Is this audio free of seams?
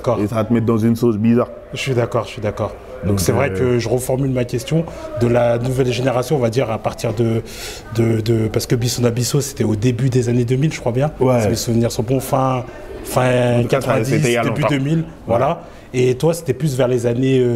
yes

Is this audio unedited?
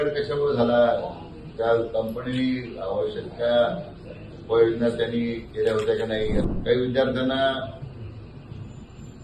no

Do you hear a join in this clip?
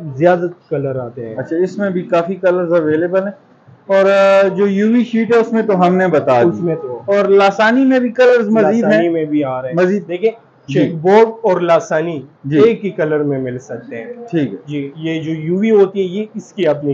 no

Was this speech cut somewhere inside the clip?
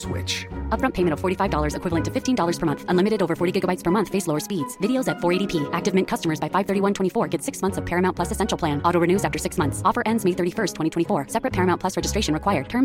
no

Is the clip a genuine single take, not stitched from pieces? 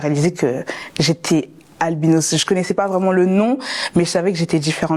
yes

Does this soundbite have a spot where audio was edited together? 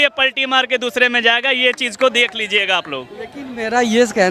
no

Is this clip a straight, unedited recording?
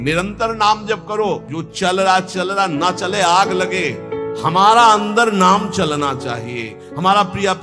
no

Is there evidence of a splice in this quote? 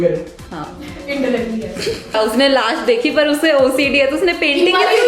yes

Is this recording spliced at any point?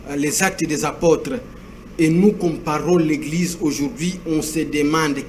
no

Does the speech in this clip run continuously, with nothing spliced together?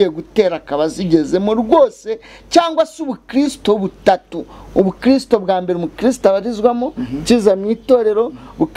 yes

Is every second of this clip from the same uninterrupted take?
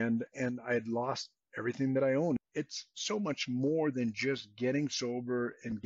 no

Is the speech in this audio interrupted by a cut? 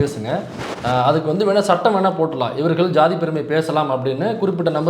no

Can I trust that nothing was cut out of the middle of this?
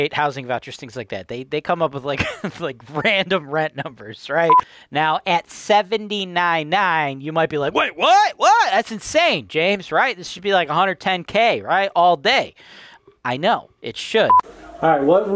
no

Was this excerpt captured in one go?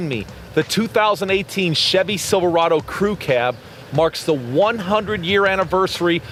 yes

